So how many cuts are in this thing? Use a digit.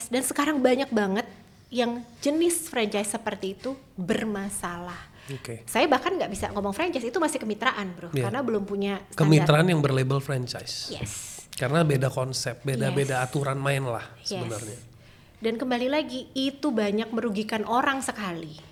0